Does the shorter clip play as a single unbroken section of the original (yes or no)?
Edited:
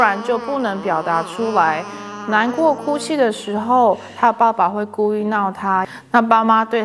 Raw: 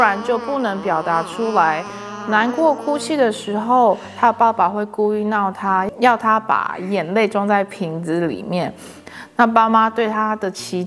no